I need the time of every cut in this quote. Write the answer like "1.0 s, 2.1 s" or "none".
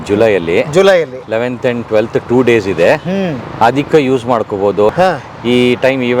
4.9 s